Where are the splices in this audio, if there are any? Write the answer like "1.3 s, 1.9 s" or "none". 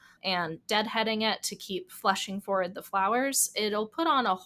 none